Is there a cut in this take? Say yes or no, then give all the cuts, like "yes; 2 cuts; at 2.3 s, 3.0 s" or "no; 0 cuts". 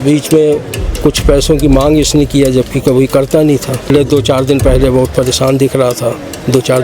yes; 1 cut; at 3.9 s